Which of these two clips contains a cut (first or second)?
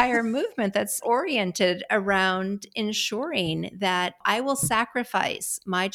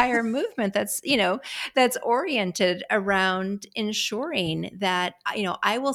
first